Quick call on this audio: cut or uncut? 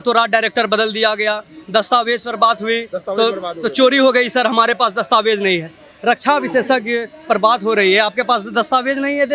uncut